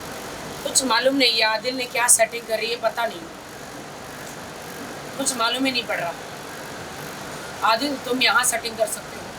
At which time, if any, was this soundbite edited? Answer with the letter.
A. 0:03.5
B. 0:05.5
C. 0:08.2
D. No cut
D